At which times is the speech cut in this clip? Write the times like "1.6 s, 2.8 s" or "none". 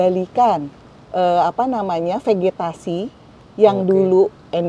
none